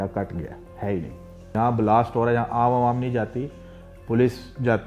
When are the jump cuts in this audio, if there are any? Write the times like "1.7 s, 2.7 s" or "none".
1.5 s

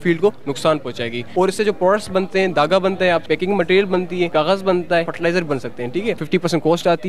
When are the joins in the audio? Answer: 1.2 s, 3.2 s, 4.3 s, 5.1 s, 6.2 s

